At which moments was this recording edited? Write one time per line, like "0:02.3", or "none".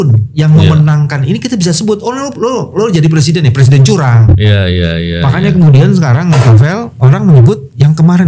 none